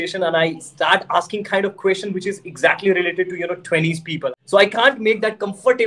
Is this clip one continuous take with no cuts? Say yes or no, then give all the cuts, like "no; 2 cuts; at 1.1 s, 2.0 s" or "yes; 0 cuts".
no; 1 cut; at 4.2 s